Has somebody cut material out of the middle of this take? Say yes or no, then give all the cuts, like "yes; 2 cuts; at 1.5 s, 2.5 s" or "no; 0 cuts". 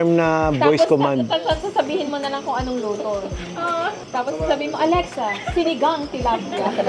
no; 0 cuts